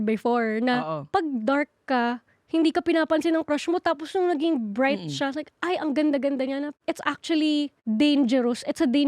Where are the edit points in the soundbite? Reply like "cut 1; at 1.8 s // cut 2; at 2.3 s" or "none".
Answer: none